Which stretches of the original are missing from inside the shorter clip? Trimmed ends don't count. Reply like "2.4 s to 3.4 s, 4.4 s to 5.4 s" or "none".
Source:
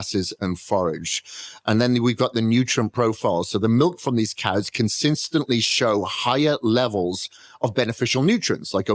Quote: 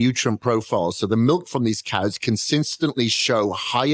none